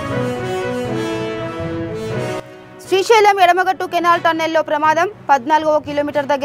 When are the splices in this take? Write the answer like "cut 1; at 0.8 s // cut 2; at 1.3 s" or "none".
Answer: none